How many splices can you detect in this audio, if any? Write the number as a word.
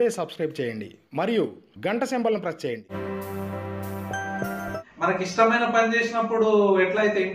two